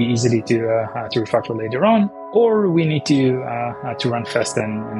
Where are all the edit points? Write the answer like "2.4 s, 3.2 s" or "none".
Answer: 2.2 s